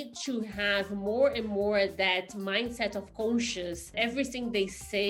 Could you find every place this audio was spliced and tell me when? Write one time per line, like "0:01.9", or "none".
0:03.9